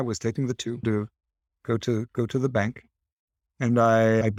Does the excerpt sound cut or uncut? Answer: uncut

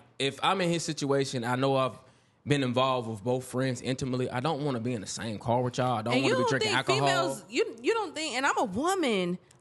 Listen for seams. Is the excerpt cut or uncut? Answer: uncut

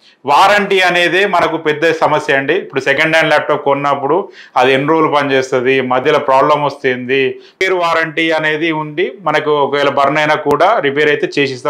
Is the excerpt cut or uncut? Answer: cut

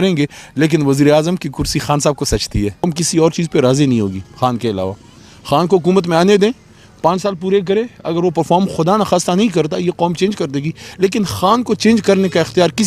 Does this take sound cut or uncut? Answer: cut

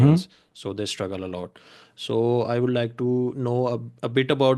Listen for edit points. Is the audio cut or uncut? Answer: uncut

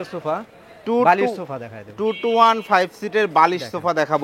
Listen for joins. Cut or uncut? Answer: uncut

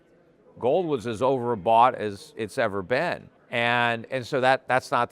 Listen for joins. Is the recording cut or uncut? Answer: cut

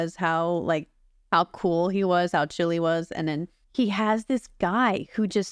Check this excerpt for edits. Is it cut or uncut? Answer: cut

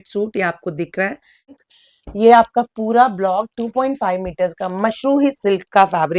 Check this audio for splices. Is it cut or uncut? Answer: cut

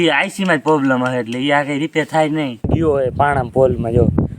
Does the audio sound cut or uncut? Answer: cut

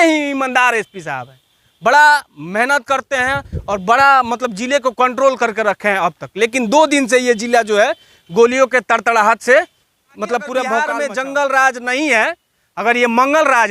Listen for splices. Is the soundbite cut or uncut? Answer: cut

